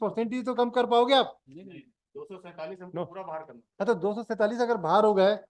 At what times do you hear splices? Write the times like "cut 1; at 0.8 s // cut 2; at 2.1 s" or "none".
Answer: none